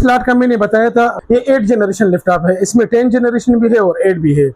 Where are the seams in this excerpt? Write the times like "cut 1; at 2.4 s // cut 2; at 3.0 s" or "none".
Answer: cut 1; at 1.1 s